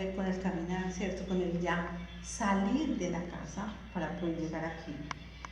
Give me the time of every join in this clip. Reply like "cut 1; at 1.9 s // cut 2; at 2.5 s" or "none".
cut 1; at 1.2 s